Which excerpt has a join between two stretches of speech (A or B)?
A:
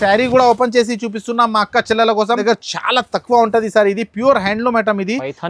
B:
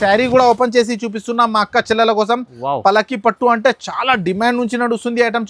A